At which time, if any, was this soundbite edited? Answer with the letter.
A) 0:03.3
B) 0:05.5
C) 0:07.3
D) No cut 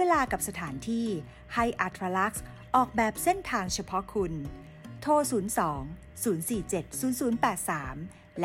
D